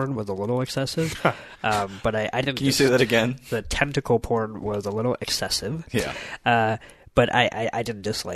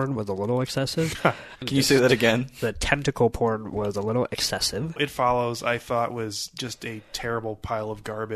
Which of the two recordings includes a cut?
second; 2 cuts; at 1.6 s, 5.0 s

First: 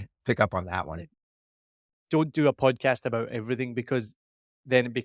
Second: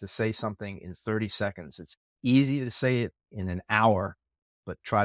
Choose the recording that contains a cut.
first; 1 cut; at 1.4 s

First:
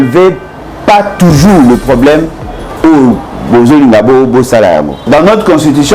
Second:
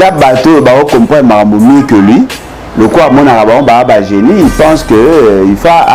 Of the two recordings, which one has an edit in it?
first; 1 cut; at 5.0 s

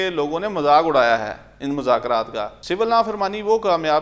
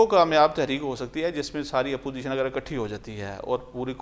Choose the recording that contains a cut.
first; 1 cut; at 2.6 s

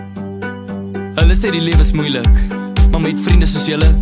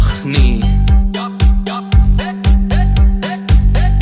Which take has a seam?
first; 1 cut; at 1.1 s

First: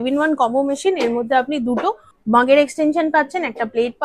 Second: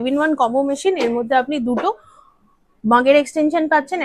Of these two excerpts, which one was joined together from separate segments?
first; 1 cut; at 2.1 s

